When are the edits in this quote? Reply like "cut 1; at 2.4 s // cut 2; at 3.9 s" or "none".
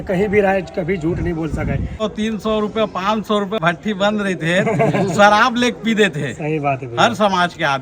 cut 1; at 2.0 s // cut 2; at 3.6 s